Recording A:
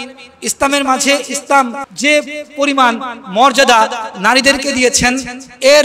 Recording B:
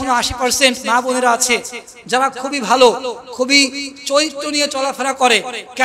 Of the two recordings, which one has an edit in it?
A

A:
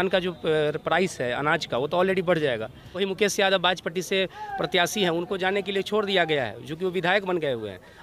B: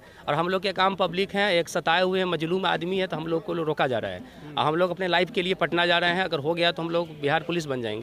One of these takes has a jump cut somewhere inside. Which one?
A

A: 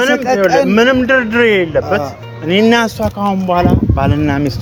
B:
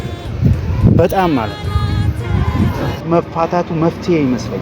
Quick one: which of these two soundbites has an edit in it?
B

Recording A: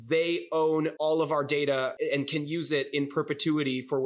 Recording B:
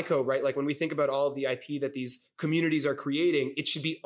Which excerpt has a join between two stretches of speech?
A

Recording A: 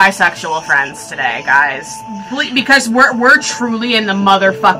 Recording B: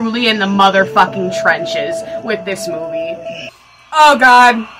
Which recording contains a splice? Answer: B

